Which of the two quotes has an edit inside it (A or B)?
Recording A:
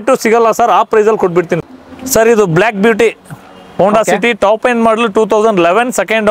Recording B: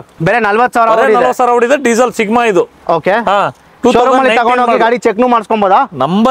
A